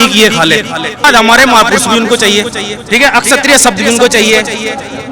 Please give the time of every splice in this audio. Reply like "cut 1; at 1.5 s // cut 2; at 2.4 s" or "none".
cut 1; at 1.0 s